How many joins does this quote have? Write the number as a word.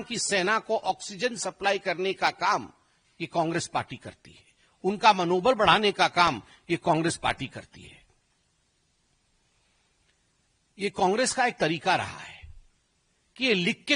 zero